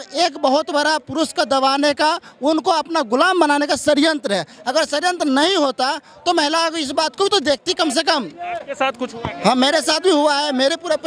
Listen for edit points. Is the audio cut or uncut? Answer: uncut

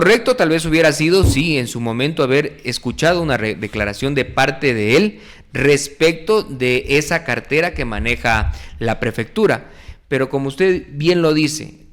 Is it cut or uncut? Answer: uncut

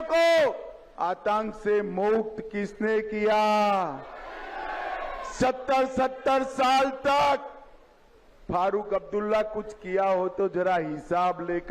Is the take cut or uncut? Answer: uncut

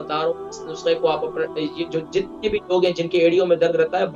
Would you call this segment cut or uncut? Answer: uncut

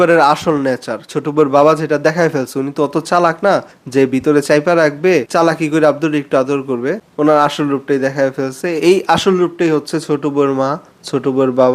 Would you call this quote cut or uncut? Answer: uncut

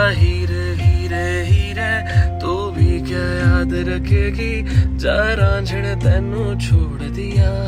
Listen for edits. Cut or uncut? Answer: uncut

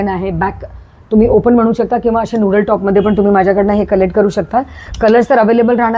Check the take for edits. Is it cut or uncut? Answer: uncut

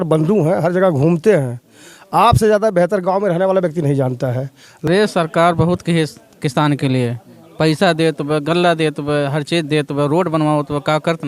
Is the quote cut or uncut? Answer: cut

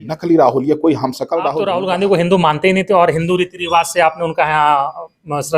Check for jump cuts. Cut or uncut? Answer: cut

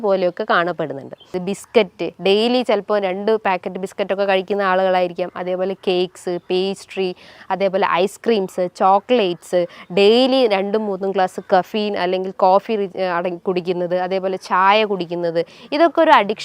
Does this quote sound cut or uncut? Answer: cut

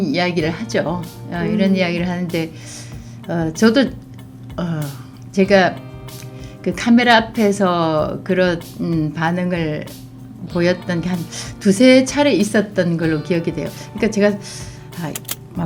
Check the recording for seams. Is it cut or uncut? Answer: uncut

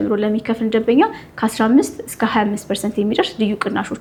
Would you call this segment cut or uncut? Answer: uncut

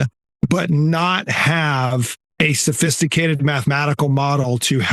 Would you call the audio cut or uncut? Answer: uncut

